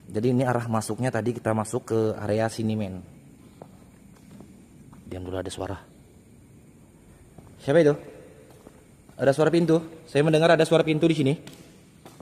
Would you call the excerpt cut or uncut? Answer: cut